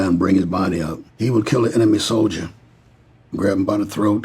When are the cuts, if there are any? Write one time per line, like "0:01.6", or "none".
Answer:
0:01.0